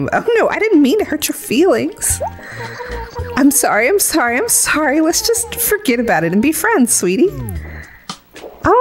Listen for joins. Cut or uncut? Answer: uncut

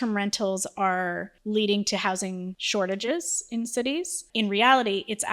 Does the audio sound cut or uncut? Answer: cut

